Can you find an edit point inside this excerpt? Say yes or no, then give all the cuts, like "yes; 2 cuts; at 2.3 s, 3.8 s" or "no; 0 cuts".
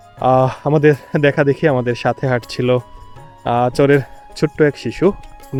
no; 0 cuts